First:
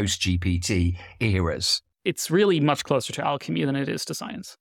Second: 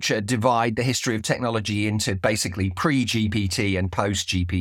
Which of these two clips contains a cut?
first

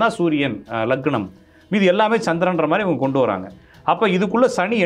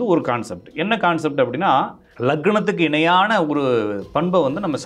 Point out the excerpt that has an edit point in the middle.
second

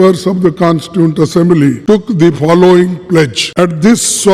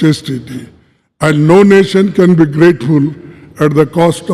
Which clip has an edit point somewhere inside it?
first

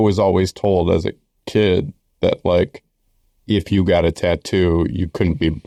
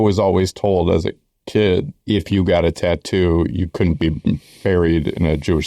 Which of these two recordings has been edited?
second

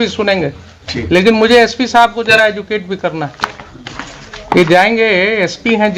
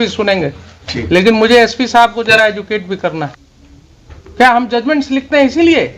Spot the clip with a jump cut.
second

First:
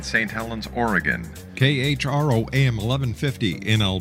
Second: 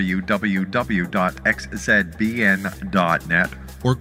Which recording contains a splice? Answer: first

